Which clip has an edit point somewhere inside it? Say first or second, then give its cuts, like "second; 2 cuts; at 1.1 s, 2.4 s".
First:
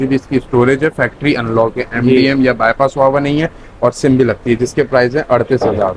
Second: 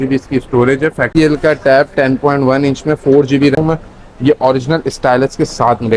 second; 2 cuts; at 1.1 s, 3.6 s